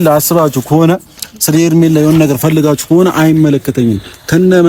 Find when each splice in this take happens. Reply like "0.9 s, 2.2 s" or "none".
none